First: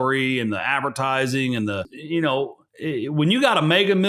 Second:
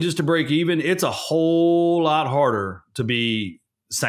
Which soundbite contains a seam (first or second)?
first